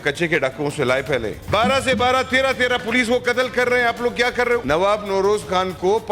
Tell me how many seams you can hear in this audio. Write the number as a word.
two